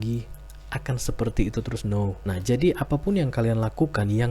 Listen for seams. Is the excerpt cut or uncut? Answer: cut